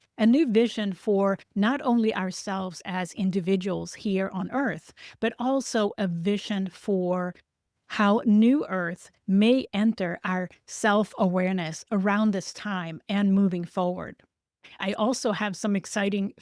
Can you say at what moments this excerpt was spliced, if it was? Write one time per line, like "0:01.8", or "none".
0:14.8